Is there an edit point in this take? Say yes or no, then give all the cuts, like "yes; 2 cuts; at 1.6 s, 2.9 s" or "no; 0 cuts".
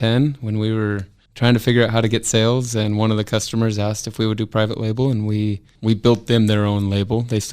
yes; 1 cut; at 5.7 s